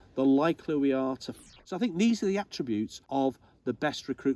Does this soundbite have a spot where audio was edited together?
yes; 2 cuts; at 1.3 s, 3.0 s

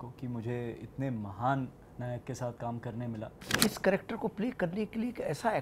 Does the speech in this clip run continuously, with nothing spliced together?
no; 1 cut; at 3.6 s

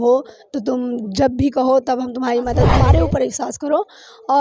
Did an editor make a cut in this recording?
yes; 1 cut; at 2.7 s

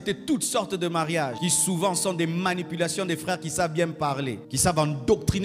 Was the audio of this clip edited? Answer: yes; 2 cuts; at 1.4 s, 4.5 s

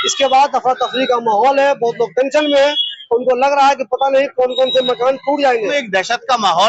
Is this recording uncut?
no; 1 cut; at 5.7 s

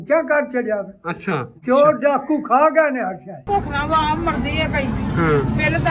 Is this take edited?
yes; 1 cut; at 3.5 s

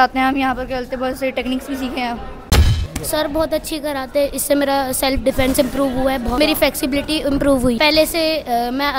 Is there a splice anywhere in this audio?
yes; 3 cuts; at 2.7 s, 6.4 s, 7.8 s

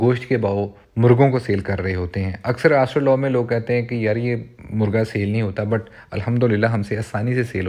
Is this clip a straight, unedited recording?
yes; 0 cuts

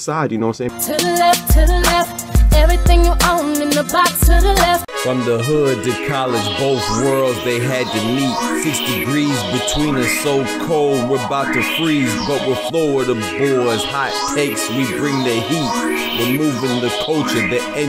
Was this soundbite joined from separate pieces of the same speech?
yes; 1 cut; at 4.9 s

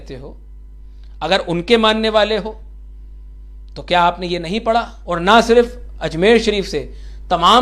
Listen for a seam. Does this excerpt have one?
yes; 1 cut; at 5.0 s

